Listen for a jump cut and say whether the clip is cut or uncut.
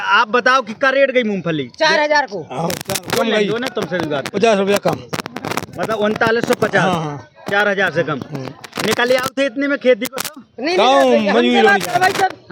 uncut